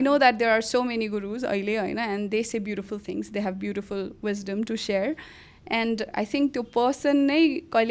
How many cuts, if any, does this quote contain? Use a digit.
0